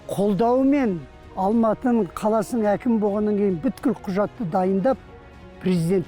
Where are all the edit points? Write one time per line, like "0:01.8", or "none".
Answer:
0:01.3
0:02.1